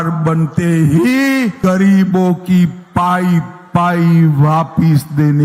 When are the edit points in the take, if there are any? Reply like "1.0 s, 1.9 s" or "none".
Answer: 1.6 s